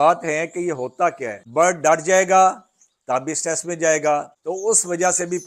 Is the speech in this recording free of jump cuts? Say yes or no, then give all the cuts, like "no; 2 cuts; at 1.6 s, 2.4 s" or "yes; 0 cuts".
no; 2 cuts; at 1.4 s, 4.4 s